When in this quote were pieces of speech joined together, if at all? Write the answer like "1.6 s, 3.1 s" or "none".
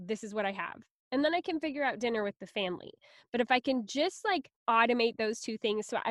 4.5 s